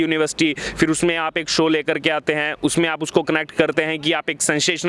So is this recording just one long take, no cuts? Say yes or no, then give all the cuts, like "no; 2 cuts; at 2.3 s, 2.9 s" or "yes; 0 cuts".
yes; 0 cuts